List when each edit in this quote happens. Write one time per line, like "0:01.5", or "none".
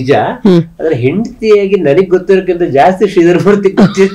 none